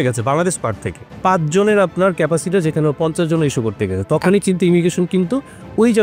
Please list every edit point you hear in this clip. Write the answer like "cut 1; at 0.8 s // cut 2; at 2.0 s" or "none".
cut 1; at 1.0 s